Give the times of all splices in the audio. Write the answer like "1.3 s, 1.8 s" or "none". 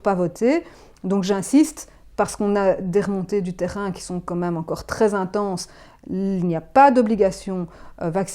none